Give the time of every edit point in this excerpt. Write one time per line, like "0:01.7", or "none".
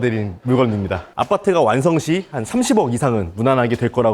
0:01.1